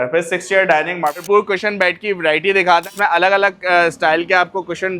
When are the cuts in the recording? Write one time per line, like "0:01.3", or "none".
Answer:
0:01.1
0:02.9

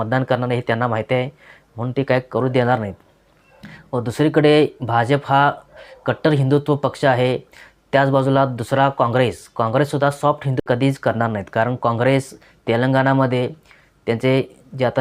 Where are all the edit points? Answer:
0:10.6

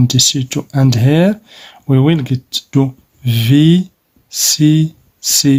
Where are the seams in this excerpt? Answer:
none

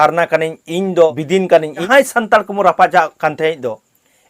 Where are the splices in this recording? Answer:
0:01.8

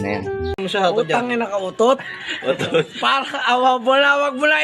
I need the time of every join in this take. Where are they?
none

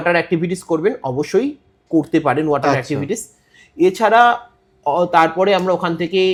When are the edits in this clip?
none

